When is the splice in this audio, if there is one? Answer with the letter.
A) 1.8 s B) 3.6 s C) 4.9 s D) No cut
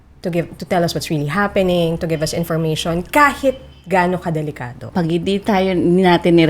C